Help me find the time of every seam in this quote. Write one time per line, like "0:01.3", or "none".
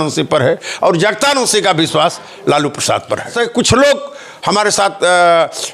0:03.3